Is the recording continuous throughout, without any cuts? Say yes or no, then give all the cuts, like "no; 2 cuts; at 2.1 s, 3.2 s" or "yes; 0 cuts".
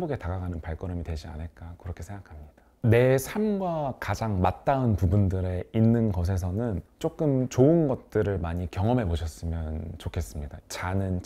yes; 0 cuts